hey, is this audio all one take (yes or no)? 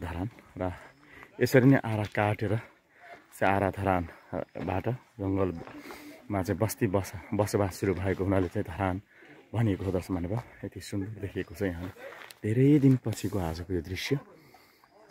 yes